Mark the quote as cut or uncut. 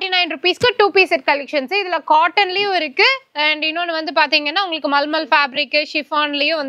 uncut